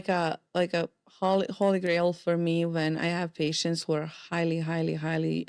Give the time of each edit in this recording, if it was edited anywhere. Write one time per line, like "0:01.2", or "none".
none